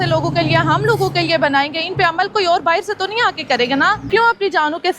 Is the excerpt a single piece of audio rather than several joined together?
no; 1 cut; at 4.1 s

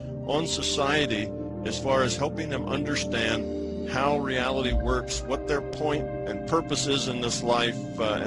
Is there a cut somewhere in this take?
yes; 1 cut; at 6.6 s

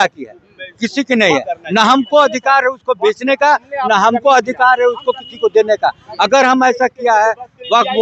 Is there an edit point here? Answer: no; 0 cuts

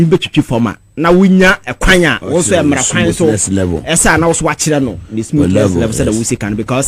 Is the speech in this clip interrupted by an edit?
no; 0 cuts

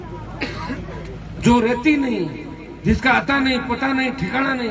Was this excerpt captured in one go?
yes; 0 cuts

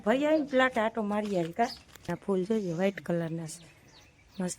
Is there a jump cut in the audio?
yes; 1 cut; at 2.1 s

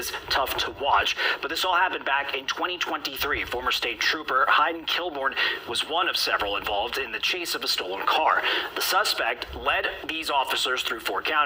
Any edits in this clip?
yes; 1 cut; at 2.8 s

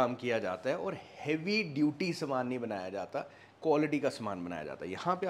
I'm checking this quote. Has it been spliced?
no; 0 cuts

